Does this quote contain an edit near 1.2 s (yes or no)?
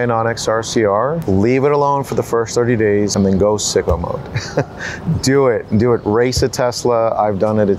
yes